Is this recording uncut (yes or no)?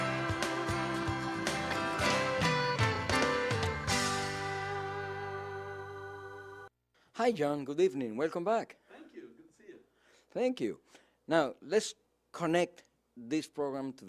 no